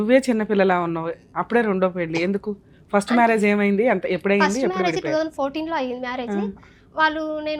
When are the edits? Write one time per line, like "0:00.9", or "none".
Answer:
none